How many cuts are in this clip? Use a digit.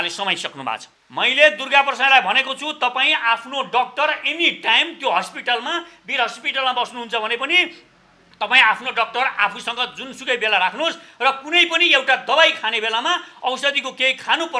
1